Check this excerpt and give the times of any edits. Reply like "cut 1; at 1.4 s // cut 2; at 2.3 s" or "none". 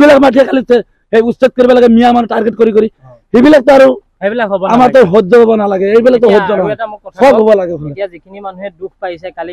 none